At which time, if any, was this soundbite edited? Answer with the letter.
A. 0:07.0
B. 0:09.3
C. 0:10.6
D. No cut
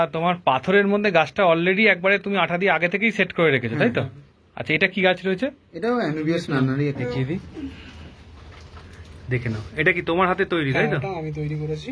A